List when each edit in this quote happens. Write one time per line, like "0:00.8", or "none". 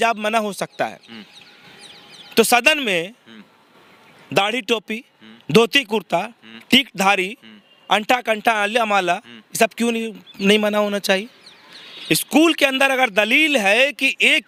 none